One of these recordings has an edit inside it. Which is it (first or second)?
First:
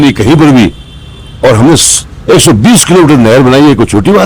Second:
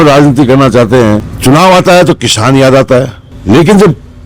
second